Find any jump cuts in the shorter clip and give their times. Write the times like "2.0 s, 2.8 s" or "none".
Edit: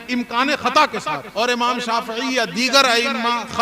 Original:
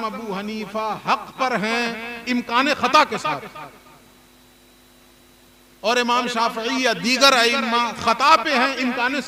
1.2 s